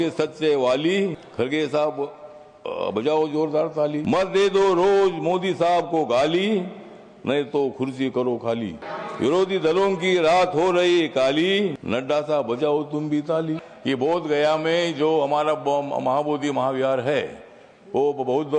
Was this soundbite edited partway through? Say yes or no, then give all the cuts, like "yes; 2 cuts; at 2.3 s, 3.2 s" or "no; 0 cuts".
yes; 5 cuts; at 1.2 s, 4.0 s, 8.9 s, 11.8 s, 13.6 s